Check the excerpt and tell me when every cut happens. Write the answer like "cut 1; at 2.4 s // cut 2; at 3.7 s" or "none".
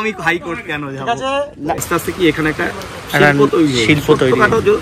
cut 1; at 1.8 s